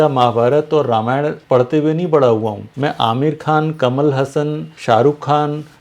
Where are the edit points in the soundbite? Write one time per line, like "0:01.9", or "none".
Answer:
0:01.4
0:02.6
0:04.7